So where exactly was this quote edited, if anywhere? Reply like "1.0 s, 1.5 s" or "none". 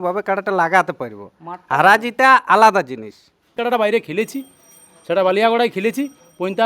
3.6 s